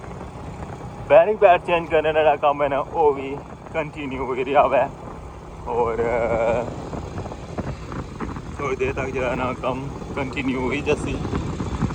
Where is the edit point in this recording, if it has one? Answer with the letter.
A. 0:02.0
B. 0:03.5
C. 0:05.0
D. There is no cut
D